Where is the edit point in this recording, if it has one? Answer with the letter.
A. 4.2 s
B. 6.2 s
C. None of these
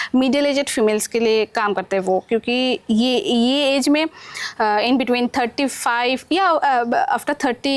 C